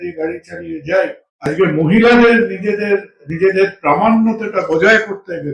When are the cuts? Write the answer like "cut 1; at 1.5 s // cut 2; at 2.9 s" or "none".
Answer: cut 1; at 1.5 s